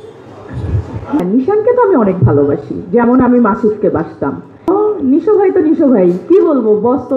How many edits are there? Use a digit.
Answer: 2